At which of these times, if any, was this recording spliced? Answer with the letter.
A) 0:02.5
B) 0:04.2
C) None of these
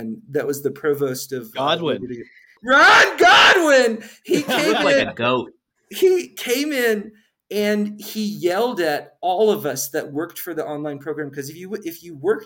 A